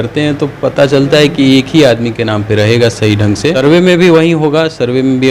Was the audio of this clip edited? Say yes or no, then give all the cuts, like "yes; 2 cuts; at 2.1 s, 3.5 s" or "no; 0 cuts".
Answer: yes; 1 cut; at 3.6 s